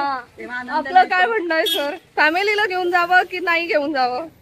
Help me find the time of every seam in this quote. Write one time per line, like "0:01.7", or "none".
none